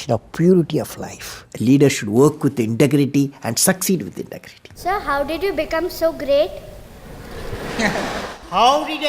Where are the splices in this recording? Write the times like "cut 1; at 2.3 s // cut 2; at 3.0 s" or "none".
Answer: cut 1; at 1.4 s // cut 2; at 4.8 s